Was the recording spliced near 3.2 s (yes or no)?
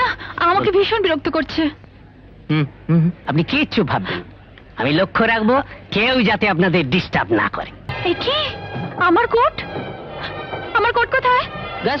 yes